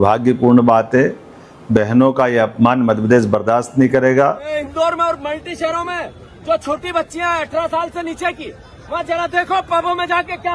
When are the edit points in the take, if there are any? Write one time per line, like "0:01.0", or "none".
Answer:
0:04.6